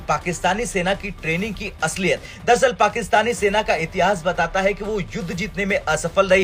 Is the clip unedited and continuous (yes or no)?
yes